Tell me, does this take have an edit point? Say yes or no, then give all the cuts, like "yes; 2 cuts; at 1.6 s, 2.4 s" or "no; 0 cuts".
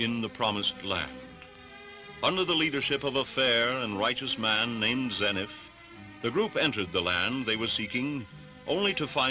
yes; 1 cut; at 5.1 s